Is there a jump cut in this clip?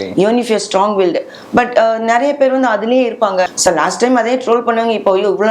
yes; 1 cut; at 3.4 s

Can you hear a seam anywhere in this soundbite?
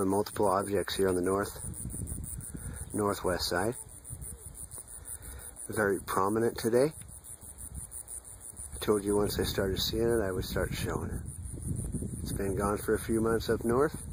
no; 0 cuts

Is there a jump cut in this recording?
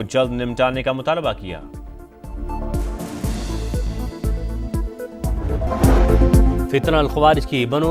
no; 0 cuts

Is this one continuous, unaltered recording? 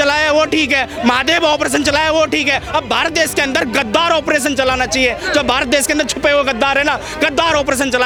yes; 0 cuts

